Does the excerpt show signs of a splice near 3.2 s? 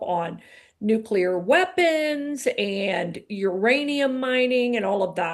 no; 0 cuts

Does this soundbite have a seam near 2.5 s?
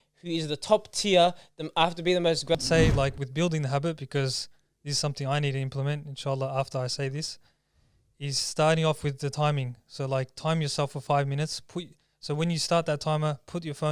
yes; 1 cut; at 2.5 s

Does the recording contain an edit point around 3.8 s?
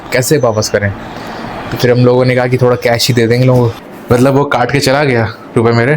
yes; 1 cut; at 3.8 s

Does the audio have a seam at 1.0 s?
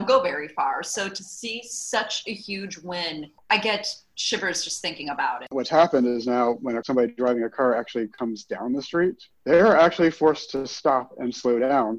no; 5 cuts; at 3.4 s, 5.5 s, 6.8 s, 8.1 s, 9.3 s

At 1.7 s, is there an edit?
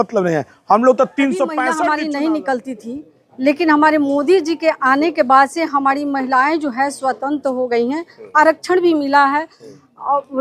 yes; 1 cut; at 1.7 s

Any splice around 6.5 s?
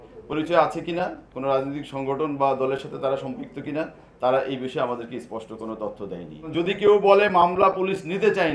yes; 1 cut; at 6.5 s

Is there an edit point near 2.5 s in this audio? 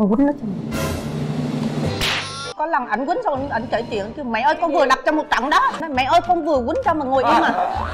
yes; 2 cuts; at 2.5 s, 5.8 s

